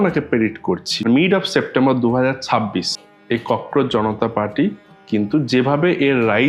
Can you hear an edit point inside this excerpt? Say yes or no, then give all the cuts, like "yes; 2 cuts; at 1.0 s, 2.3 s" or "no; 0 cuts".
yes; 2 cuts; at 0.9 s, 3.0 s